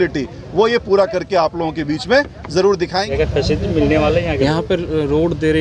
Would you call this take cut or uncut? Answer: cut